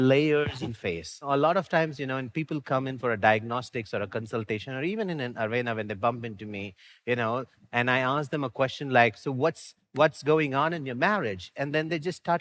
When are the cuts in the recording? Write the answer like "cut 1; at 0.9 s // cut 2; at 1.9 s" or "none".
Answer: cut 1; at 1.2 s